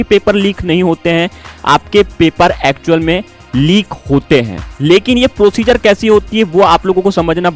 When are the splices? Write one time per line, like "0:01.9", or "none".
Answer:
none